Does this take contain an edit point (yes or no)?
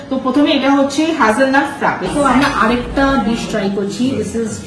yes